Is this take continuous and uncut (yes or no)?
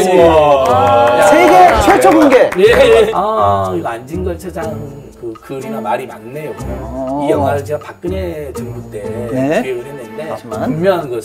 no